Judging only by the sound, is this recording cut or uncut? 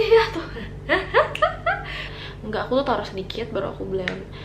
cut